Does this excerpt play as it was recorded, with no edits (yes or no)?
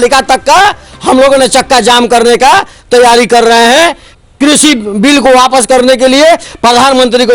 no